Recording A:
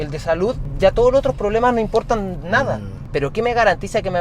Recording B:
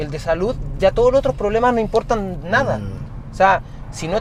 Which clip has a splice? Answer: A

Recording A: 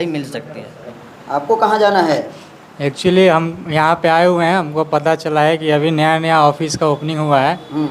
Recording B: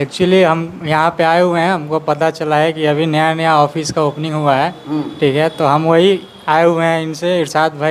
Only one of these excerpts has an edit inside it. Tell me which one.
A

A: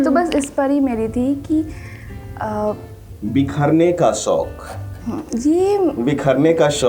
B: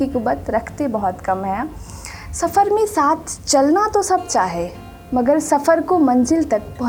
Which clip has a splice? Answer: A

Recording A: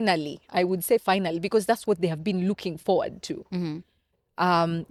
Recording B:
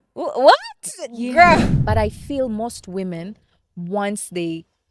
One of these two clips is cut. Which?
B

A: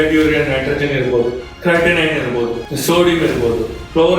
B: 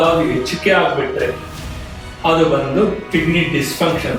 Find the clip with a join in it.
A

